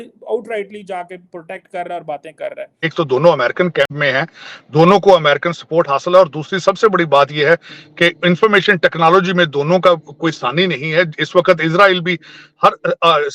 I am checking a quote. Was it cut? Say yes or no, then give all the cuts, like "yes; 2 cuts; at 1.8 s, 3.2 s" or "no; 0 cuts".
yes; 1 cut; at 2.9 s